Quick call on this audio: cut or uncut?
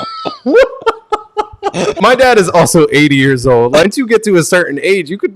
cut